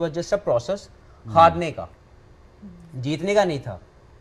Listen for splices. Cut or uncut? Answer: uncut